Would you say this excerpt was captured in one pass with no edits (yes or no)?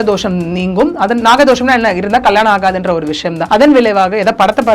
no